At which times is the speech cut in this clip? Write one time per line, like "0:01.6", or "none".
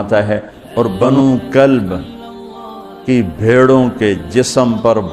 0:01.0